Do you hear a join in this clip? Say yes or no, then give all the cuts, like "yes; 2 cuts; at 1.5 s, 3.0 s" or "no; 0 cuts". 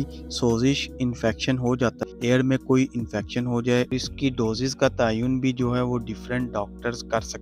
yes; 2 cuts; at 2.1 s, 3.9 s